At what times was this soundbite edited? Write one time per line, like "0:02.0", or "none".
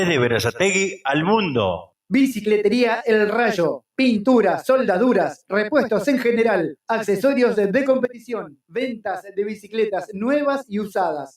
0:01.9

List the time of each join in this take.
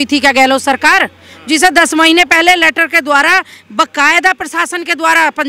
none

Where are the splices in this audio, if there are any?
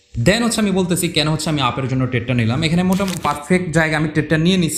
0:03.2

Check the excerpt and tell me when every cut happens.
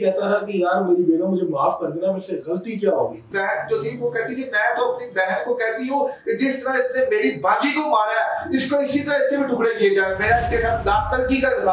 0:03.3

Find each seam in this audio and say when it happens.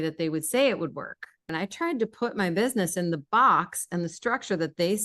0:01.5

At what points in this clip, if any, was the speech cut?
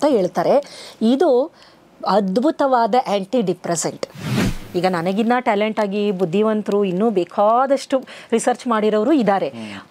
0:04.4

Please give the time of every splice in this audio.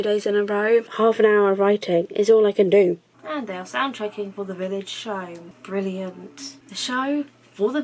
0:00.9
0:03.1
0:05.5

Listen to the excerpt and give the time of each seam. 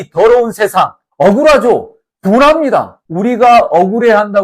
0:03.0

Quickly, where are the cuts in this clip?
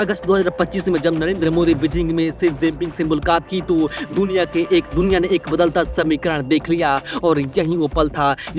none

